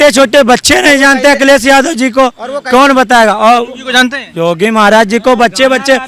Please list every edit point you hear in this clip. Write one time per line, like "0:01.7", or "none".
none